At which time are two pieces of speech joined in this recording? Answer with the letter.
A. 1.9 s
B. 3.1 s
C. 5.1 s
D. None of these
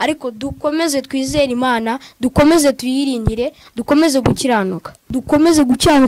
C